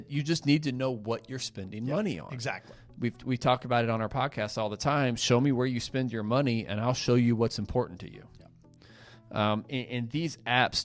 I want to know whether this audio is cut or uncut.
uncut